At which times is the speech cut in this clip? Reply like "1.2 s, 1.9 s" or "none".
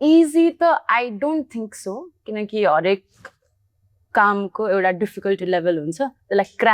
none